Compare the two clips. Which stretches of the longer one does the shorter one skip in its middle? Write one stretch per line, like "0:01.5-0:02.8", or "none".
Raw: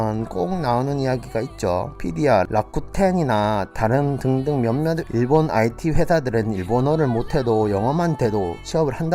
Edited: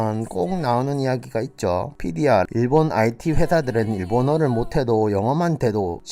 0:02.5-0:05.1

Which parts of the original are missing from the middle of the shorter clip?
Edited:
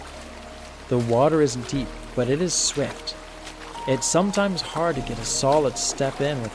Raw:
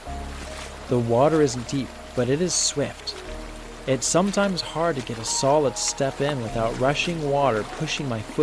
none

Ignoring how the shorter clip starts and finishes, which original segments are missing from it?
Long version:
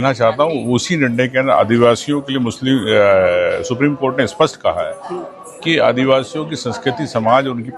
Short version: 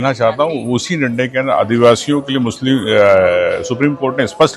none

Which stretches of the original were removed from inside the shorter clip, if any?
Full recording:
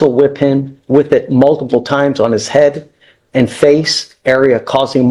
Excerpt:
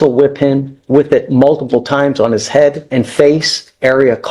0:02.8-0:03.3

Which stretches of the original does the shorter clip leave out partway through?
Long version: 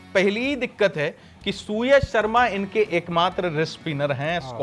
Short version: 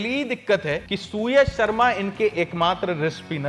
0:01.3-0:01.5

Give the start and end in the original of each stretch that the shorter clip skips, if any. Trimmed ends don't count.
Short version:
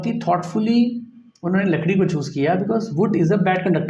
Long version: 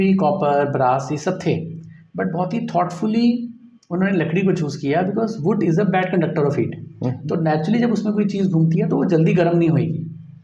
none

